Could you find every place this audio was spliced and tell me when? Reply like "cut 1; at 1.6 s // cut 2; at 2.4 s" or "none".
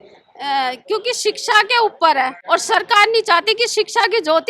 cut 1; at 2.4 s